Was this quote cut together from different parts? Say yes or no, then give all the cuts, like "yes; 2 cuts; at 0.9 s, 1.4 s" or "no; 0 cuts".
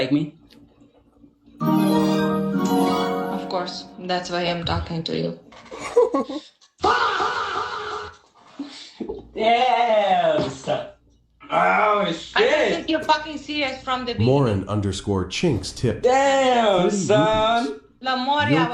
no; 0 cuts